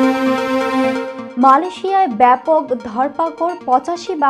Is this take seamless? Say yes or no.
no